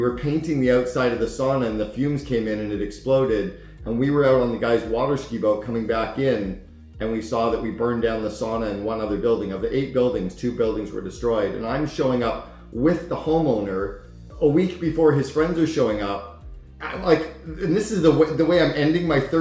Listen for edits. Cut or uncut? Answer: uncut